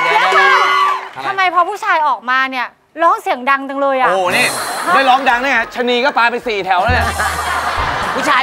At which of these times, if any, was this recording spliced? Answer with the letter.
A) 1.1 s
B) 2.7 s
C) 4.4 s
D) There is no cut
A